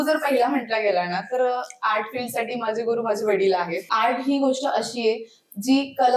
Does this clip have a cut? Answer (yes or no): yes